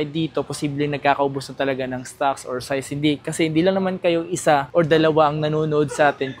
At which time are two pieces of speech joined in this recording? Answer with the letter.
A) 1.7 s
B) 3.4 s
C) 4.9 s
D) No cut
D